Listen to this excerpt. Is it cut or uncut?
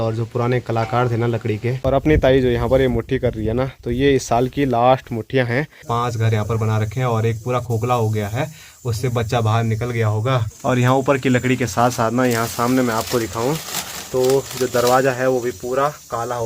cut